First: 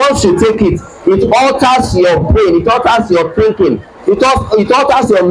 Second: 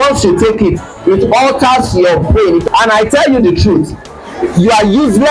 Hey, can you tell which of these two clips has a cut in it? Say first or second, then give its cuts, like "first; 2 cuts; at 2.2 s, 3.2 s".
second; 1 cut; at 2.7 s